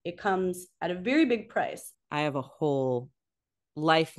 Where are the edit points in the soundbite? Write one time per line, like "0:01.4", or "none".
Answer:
0:01.8